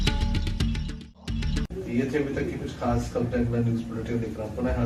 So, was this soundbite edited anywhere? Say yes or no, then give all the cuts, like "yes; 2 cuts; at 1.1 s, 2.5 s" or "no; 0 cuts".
no; 0 cuts